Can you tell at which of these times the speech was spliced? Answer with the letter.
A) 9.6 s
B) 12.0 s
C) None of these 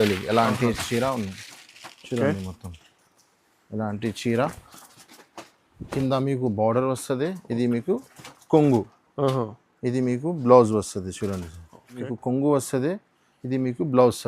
B